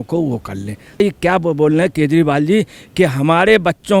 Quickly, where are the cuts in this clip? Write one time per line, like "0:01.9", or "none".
0:01.0